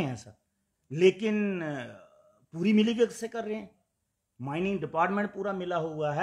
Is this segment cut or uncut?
uncut